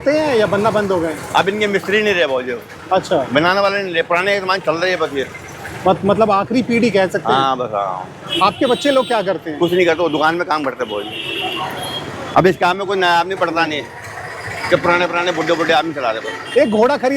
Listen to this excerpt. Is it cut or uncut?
uncut